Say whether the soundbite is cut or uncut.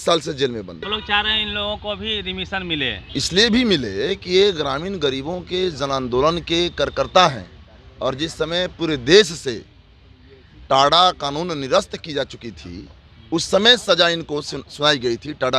cut